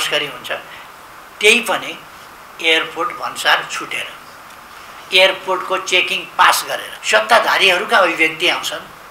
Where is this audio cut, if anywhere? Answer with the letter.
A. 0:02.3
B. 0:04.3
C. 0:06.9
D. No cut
C